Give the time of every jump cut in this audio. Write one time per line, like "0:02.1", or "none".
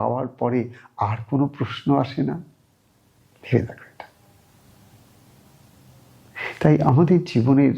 none